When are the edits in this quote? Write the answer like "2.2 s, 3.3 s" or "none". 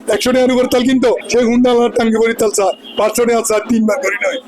1.2 s